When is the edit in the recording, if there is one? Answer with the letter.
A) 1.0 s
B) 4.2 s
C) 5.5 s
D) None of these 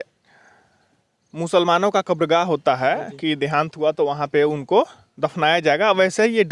D